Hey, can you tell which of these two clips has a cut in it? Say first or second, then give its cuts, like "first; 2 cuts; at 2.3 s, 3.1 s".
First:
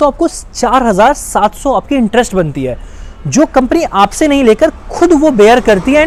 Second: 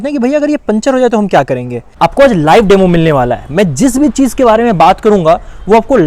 second; 1 cut; at 1.8 s